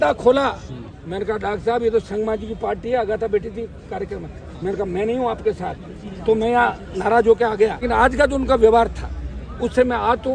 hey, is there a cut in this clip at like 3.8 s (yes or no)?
no